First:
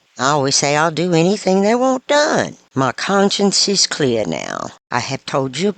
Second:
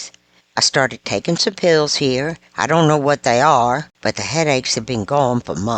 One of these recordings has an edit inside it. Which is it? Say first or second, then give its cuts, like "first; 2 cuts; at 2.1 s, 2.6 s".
first; 1 cut; at 2.6 s